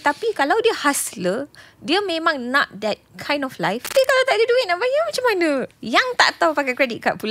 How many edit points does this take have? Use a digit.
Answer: 2